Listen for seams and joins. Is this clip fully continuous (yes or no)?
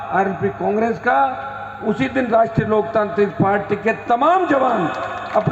yes